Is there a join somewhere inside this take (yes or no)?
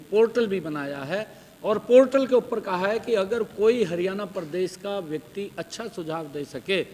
no